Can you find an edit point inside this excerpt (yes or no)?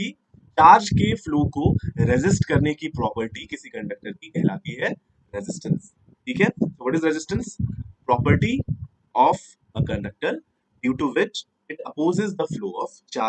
no